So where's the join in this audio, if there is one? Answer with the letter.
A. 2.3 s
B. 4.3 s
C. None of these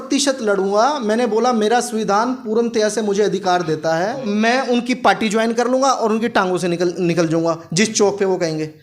B